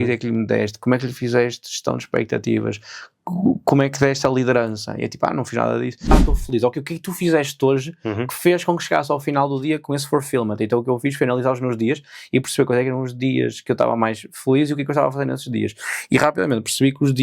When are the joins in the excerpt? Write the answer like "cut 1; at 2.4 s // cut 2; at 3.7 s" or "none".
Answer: cut 1; at 6.1 s